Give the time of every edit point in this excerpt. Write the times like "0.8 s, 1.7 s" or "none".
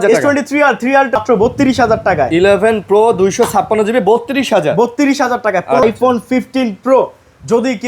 1.2 s, 5.8 s